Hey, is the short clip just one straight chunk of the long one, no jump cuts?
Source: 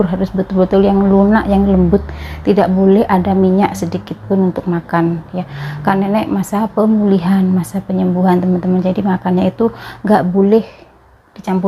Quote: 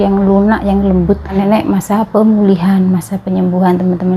no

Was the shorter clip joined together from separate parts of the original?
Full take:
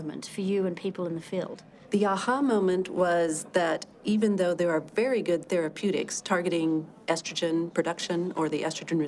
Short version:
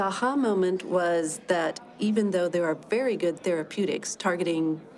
no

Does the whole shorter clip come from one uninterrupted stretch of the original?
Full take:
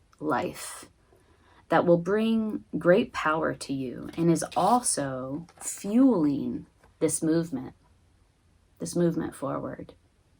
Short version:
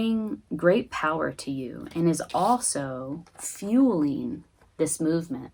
yes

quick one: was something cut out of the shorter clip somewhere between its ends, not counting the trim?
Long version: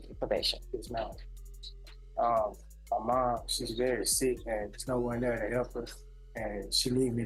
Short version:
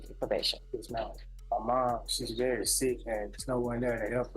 yes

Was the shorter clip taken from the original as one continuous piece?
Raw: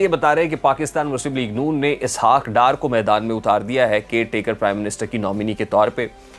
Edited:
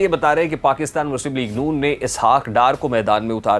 yes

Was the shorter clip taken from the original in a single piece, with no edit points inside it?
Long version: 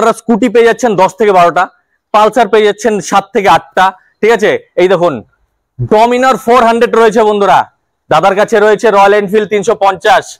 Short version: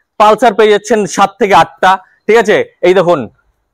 yes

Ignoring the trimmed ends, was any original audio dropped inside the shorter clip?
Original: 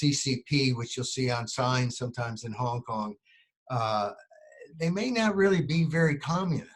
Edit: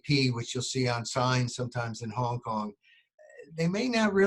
yes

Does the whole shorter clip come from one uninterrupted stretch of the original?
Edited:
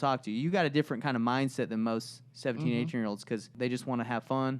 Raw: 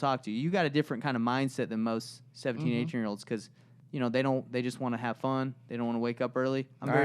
no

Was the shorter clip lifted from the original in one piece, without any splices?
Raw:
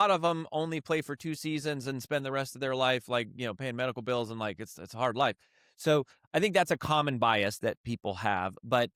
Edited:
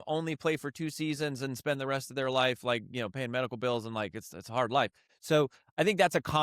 no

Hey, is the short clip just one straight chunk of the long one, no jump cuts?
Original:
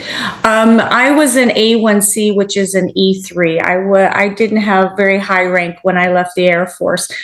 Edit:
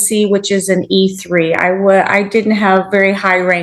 yes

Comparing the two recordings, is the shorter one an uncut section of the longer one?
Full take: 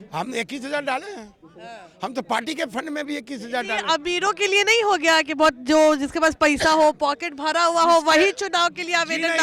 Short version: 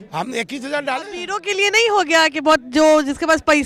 no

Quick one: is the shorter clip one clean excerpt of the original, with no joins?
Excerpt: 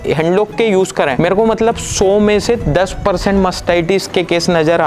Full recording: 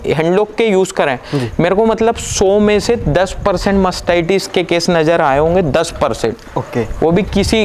no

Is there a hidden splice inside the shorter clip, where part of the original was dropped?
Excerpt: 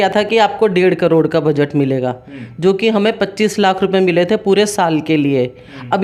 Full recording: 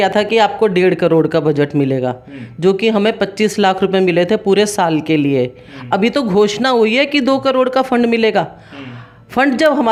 no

